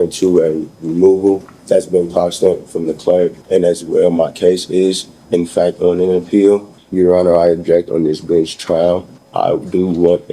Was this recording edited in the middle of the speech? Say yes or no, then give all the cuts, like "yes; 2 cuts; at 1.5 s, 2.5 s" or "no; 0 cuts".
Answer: yes; 4 cuts; at 1.5 s, 3.4 s, 6.8 s, 9.2 s